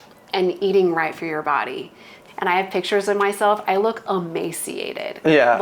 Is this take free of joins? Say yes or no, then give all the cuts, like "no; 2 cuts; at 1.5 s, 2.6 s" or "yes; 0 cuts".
no; 1 cut; at 2.1 s